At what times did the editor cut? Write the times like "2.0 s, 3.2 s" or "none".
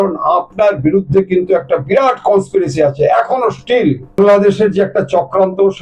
4.2 s